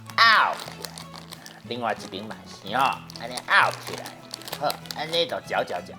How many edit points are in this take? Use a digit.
1